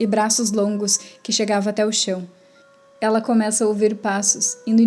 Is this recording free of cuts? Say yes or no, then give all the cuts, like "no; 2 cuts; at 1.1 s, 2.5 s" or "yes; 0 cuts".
no; 1 cut; at 2.6 s